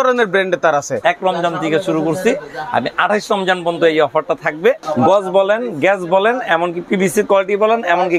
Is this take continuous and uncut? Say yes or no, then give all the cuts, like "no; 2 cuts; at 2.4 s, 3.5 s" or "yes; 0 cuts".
no; 2 cuts; at 0.9 s, 4.9 s